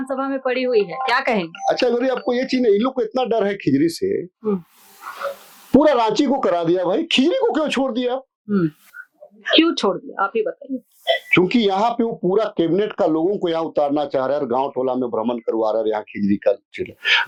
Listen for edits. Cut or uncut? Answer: uncut